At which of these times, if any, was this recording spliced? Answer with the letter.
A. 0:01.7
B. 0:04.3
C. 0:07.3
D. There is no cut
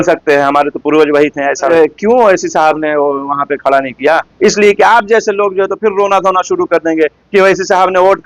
A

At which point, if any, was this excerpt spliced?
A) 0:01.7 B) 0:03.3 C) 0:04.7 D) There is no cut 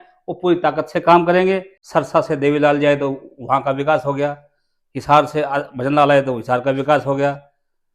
A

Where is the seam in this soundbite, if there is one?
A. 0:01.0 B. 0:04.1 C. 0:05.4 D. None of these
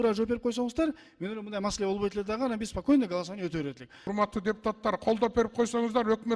B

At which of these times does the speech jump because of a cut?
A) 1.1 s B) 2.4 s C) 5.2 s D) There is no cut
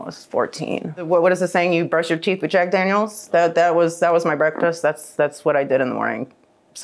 A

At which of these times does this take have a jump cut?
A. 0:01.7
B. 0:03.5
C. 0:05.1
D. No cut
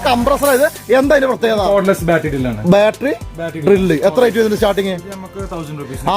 A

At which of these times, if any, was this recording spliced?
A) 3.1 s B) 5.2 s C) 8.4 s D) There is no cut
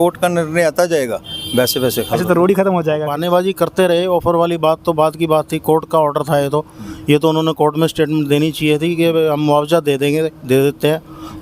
A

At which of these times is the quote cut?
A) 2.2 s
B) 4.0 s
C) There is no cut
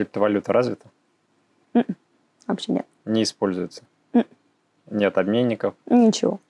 C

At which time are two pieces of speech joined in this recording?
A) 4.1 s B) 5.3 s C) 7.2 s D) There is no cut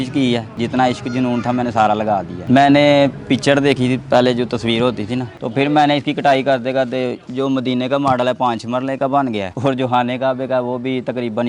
B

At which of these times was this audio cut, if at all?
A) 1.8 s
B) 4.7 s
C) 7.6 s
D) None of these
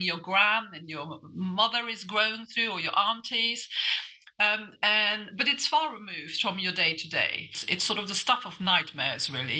C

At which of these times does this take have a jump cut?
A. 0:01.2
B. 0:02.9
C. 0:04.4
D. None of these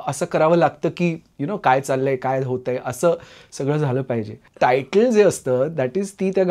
C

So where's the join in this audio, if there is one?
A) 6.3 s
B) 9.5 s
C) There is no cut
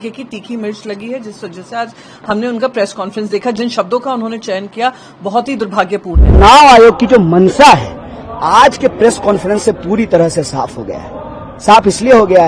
A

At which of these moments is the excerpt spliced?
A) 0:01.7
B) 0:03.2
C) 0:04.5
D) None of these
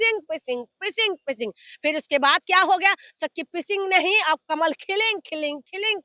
D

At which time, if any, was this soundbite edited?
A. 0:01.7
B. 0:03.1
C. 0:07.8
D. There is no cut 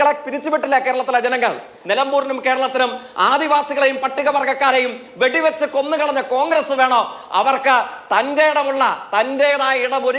A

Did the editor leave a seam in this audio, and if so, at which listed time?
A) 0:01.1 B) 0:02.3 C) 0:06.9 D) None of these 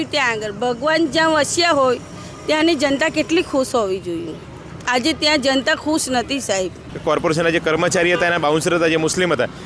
C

